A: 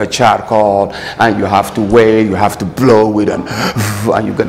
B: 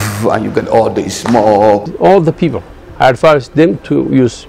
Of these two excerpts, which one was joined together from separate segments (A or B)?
B